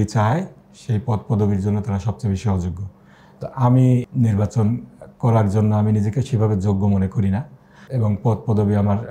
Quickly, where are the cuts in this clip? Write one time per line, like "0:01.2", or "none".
0:04.1
0:07.8